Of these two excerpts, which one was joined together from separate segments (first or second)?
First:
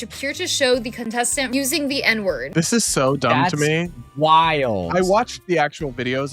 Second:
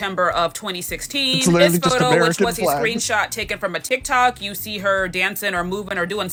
first